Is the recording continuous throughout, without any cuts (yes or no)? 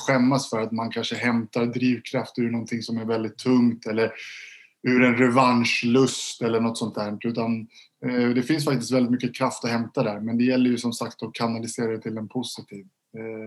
yes